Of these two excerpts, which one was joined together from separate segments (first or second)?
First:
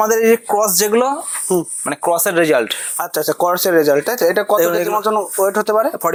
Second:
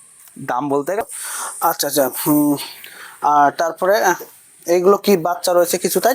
second